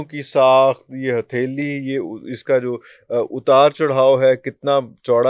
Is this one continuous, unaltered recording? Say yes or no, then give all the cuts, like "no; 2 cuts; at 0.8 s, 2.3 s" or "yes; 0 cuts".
yes; 0 cuts